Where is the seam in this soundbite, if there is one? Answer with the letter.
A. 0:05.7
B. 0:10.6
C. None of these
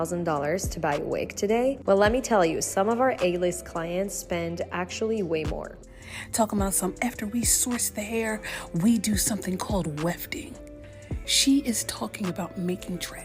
A